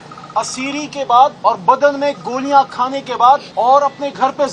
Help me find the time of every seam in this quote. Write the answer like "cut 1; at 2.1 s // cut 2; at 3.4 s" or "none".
cut 1; at 1.4 s // cut 2; at 3.5 s